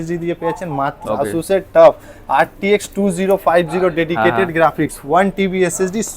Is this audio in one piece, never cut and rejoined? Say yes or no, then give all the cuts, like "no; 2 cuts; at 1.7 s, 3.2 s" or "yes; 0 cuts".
no; 1 cut; at 1.0 s